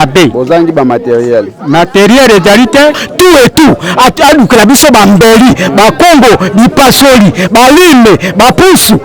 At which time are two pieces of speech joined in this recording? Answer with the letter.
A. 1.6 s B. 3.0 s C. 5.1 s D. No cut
B